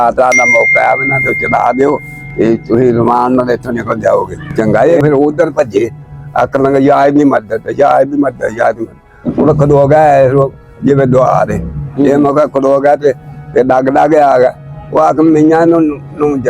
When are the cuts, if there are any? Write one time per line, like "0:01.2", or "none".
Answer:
0:04.5